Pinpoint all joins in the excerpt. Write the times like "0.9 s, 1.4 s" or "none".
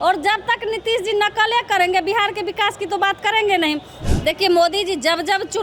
3.9 s